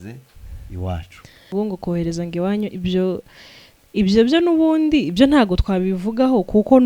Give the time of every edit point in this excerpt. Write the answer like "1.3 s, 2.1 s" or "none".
1.5 s